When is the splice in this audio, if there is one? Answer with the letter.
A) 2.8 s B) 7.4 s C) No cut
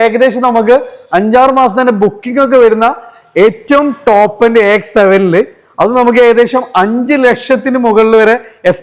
C